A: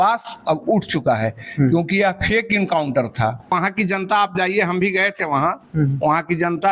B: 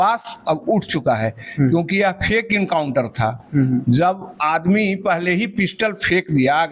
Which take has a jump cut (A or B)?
A